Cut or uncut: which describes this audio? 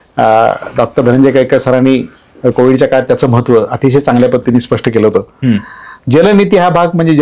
uncut